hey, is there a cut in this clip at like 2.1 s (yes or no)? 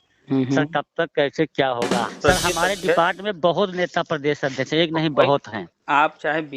yes